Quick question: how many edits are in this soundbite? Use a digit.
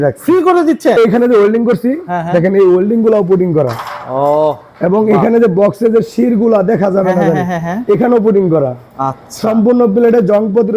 1